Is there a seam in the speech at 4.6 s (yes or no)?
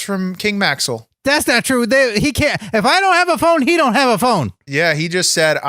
yes